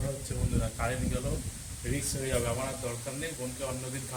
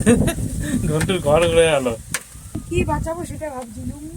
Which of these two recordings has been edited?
second; 1 cut; at 2.6 s

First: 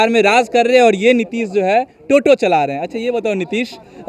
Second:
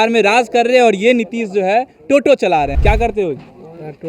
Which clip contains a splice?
second; 1 cut; at 2.8 s

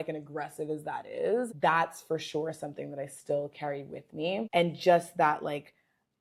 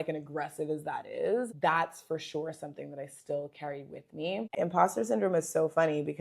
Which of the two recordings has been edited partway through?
second; 1 cut; at 4.5 s

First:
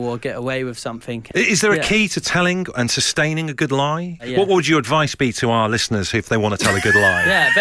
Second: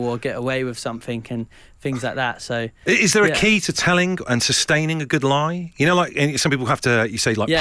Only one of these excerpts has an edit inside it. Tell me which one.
first; 2 cuts; at 1.2 s, 4.2 s

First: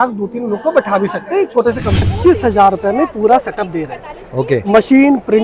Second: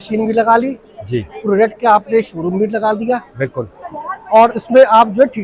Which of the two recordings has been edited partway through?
first; 1 cut; at 2.1 s

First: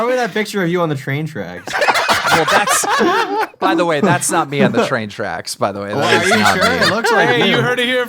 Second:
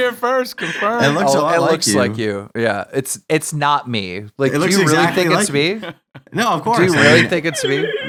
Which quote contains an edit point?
first; 1 cut; at 1.6 s

